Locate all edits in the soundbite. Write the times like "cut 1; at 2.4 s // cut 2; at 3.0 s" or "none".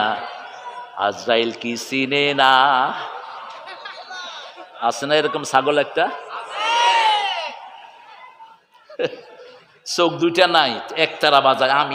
none